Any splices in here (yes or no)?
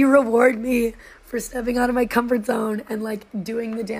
no